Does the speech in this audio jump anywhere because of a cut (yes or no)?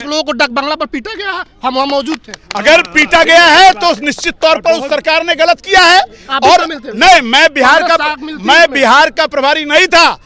no